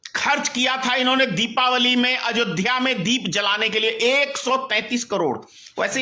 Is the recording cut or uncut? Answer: uncut